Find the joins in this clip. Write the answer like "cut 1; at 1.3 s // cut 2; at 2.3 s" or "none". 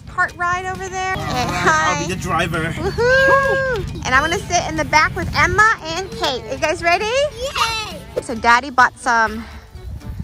cut 1; at 1.1 s // cut 2; at 8.0 s